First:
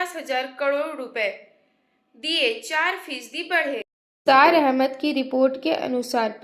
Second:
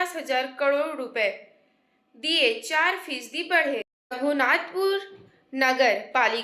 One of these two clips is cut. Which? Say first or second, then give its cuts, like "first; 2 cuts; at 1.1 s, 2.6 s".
second; 1 cut; at 4.0 s